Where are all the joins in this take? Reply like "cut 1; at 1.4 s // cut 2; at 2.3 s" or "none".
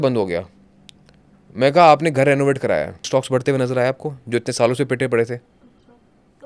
cut 1; at 3.0 s